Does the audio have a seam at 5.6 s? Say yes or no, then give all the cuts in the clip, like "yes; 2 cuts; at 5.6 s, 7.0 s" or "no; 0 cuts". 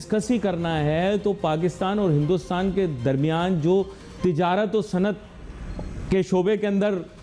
no; 0 cuts